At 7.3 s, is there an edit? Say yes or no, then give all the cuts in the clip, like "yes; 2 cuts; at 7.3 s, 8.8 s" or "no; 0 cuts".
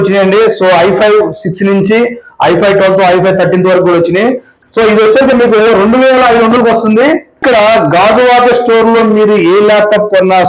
yes; 2 cuts; at 4.5 s, 7.3 s